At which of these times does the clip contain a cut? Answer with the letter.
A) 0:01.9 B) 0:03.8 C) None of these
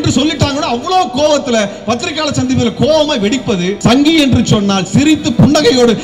B